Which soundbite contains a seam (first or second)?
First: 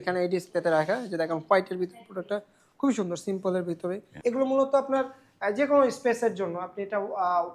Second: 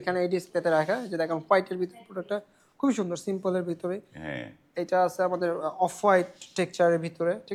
first